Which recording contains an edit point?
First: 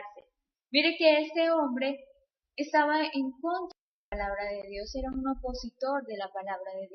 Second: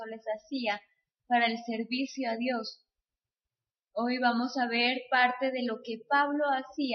first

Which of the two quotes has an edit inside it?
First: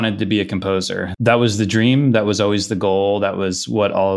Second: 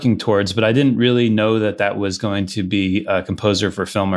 first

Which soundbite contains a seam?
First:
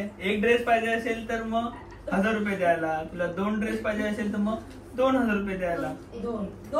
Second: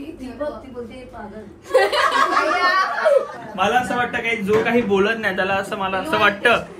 second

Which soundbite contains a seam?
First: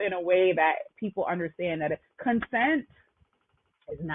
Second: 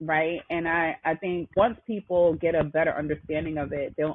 second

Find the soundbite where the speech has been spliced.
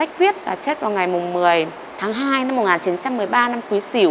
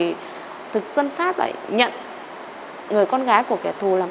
first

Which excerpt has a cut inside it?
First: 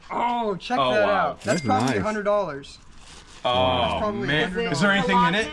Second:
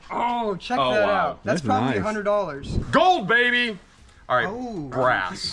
second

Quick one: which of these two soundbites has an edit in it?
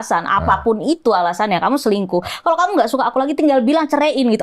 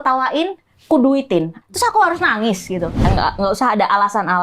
second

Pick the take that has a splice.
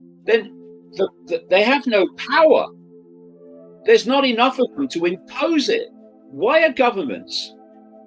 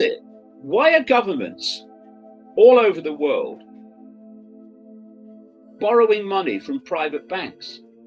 second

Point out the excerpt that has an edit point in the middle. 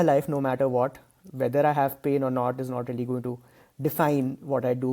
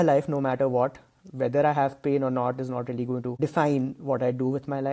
second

